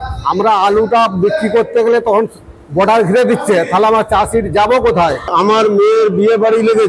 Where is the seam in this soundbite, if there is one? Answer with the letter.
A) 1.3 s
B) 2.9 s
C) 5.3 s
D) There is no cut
C